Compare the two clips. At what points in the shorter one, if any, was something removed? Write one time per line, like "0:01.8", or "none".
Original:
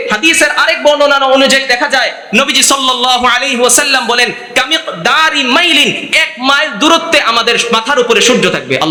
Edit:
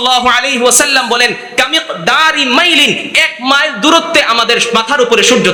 none